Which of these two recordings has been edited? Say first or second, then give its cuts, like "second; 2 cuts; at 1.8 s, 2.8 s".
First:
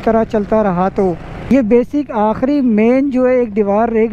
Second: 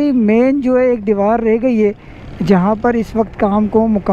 first; 1 cut; at 1.5 s